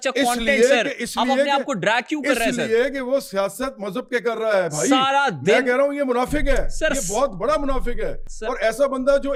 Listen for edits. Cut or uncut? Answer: uncut